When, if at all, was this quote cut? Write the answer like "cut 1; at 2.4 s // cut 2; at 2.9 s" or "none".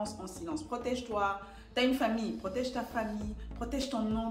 none